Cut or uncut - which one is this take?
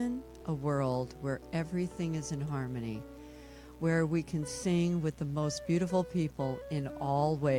uncut